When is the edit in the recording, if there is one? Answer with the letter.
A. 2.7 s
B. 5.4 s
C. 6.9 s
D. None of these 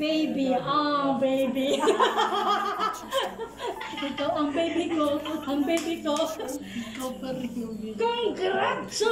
D